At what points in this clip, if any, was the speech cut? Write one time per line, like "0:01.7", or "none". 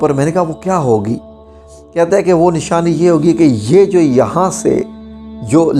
none